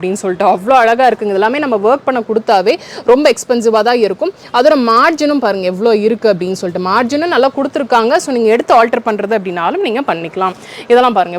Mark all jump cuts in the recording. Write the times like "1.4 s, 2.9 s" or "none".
none